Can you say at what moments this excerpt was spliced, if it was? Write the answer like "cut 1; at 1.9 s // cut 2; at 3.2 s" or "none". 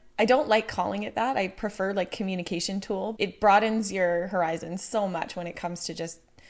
cut 1; at 3.1 s